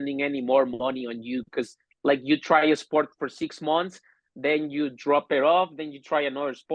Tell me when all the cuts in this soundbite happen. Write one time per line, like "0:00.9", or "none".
none